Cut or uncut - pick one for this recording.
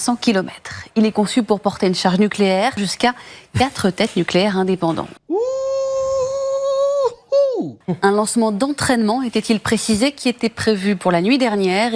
cut